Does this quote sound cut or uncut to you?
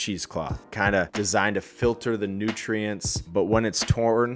cut